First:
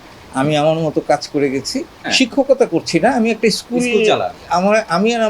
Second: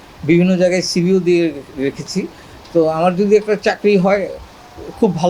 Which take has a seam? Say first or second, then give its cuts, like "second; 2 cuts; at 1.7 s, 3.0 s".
first; 1 cut; at 2.1 s